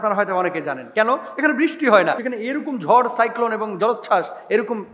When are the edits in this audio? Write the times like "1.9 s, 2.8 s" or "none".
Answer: 2.2 s